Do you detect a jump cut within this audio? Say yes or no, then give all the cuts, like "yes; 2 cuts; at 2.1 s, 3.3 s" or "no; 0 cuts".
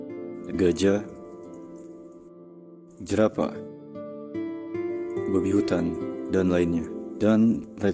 no; 0 cuts